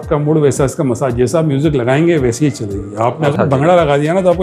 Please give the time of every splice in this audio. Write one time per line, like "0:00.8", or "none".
0:03.3